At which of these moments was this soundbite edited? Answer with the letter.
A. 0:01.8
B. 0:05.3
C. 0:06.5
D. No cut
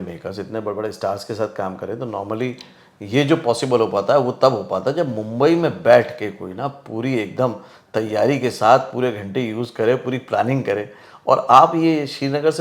D